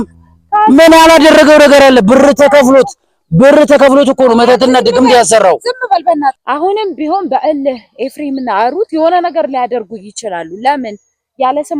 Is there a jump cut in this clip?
yes; 1 cut; at 6.4 s

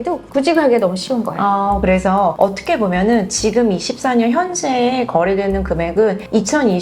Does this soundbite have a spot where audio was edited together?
yes; 1 cut; at 1.8 s

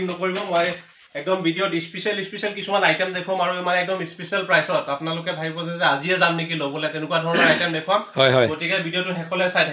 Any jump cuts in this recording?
no; 0 cuts

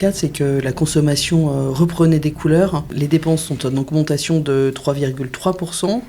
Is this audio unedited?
no; 1 cut; at 2.9 s

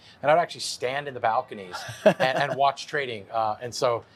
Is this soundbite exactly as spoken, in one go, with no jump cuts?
yes; 0 cuts

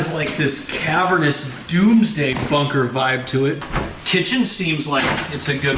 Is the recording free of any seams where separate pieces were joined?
no; 1 cut; at 3.6 s

